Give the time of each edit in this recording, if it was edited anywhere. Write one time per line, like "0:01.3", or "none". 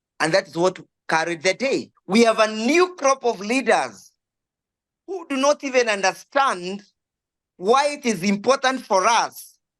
0:01.9